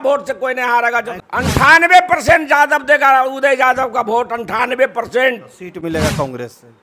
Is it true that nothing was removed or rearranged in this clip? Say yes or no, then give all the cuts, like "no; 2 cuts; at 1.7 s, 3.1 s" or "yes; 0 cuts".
no; 1 cut; at 1.2 s